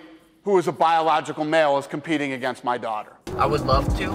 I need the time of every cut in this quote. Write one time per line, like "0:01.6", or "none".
0:03.2